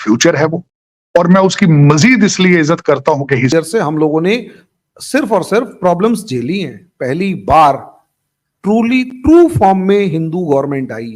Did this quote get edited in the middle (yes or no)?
yes